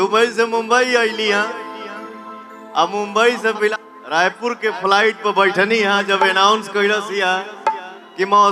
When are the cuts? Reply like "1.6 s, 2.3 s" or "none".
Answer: 3.7 s